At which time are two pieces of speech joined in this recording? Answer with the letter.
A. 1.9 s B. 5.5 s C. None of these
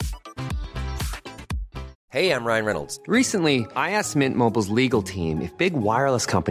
A